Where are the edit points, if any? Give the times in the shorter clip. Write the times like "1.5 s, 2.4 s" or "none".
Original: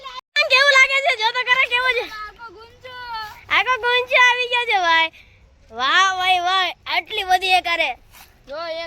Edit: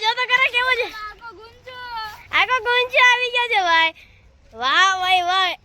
none